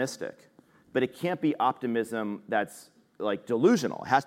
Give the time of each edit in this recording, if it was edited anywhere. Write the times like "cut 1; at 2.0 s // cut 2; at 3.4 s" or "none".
none